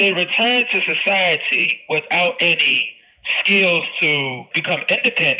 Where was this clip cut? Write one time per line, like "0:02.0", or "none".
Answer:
0:04.5